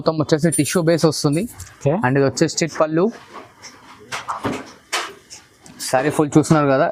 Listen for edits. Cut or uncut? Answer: uncut